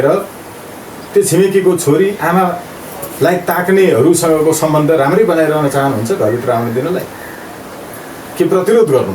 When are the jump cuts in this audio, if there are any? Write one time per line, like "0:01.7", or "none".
none